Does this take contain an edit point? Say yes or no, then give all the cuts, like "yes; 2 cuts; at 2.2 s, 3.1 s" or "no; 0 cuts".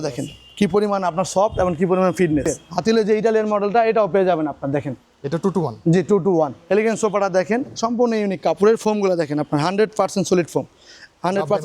yes; 2 cuts; at 2.5 s, 6.6 s